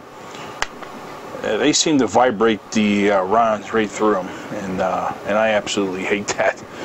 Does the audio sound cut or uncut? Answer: uncut